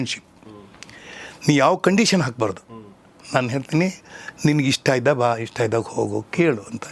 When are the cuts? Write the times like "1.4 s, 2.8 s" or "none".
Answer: none